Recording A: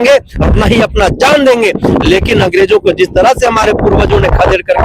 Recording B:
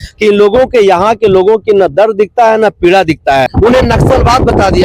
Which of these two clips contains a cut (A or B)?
B